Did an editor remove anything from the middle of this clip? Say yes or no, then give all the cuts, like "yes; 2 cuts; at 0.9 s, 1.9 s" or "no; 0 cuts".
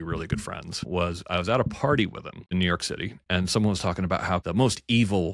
yes; 3 cuts; at 0.9 s, 2.5 s, 4.4 s